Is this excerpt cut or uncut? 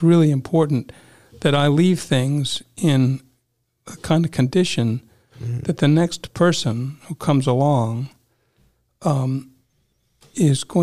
uncut